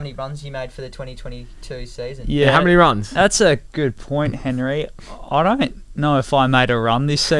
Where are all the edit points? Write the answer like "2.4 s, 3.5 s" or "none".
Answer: none